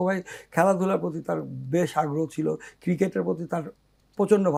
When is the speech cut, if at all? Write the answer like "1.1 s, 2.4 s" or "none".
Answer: none